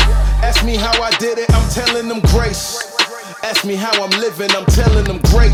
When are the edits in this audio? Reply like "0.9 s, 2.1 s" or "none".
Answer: none